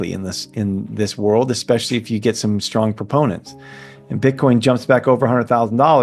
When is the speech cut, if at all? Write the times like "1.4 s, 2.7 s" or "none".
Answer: none

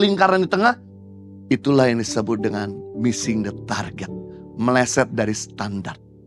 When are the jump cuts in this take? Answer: none

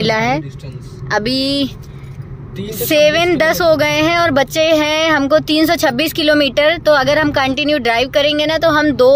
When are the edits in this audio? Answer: none

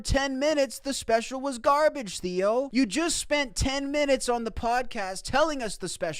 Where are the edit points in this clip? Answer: 2.7 s

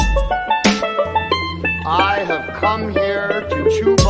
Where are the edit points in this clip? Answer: 1.2 s

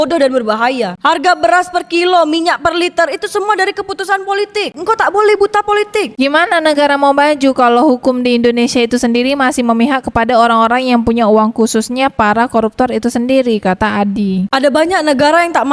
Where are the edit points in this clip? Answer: 1.0 s, 4.8 s, 6.1 s, 14.5 s

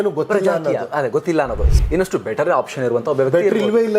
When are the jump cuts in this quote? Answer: 1.7 s

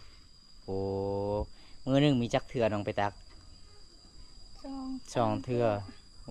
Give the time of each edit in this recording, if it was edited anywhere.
none

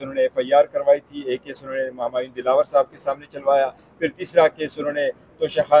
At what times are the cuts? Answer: none

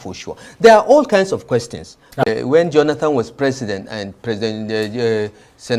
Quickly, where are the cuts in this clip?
2.2 s

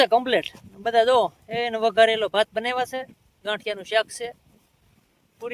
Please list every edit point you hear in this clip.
none

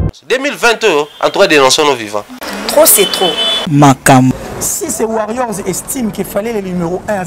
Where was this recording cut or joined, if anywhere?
4.4 s

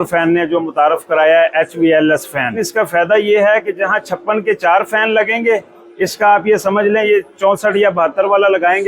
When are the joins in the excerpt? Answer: 2.6 s

